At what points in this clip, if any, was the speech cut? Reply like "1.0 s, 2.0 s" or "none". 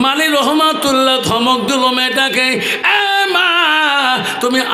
none